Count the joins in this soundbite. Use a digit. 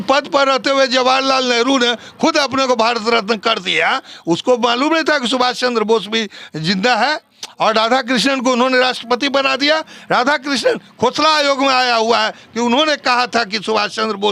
0